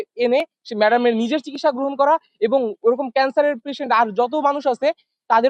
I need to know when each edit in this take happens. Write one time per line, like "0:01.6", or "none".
none